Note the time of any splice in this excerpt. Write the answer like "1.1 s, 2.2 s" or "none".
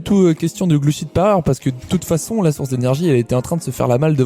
none